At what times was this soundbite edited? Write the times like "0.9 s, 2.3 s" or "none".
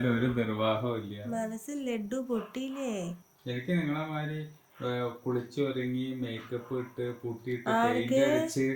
3.3 s